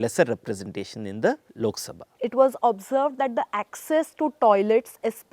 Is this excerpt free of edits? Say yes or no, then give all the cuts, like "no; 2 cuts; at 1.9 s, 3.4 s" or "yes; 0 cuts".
no; 1 cut; at 2.1 s